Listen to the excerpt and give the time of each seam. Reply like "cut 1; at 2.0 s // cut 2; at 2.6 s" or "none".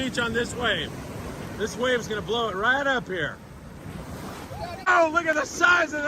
cut 1; at 4.9 s